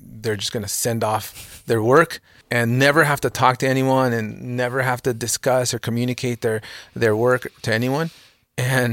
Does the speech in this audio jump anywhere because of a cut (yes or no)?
yes